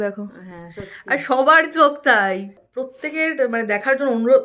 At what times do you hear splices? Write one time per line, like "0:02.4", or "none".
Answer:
0:03.0